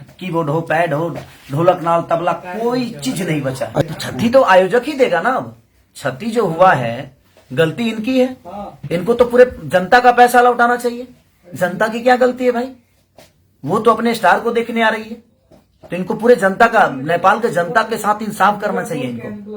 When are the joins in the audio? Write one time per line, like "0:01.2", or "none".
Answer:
0:03.8